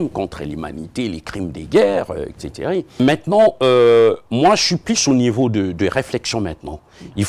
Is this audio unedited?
no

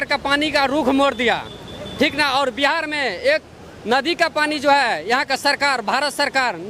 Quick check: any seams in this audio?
no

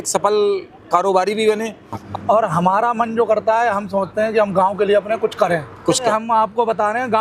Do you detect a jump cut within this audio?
yes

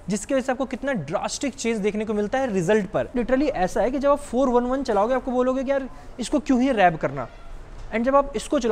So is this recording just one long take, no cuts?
no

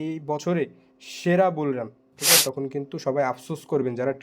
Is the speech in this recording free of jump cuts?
no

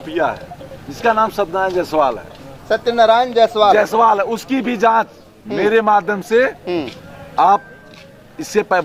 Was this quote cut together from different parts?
no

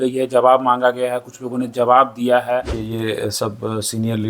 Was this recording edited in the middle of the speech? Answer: yes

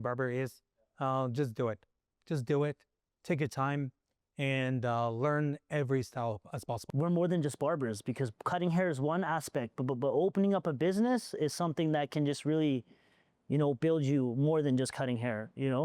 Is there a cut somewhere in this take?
yes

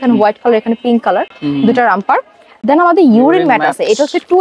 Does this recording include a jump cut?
no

